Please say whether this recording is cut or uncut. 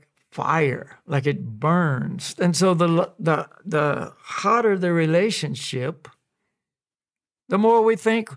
cut